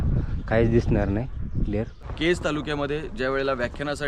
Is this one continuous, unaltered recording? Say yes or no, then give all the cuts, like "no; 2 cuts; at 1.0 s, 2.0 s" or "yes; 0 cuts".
no; 1 cut; at 2.0 s